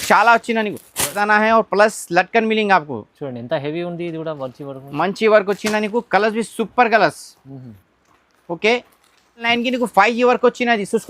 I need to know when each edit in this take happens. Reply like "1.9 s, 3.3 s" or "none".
1.1 s, 9.5 s